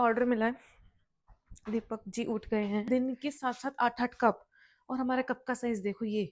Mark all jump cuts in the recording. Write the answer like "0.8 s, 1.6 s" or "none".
2.9 s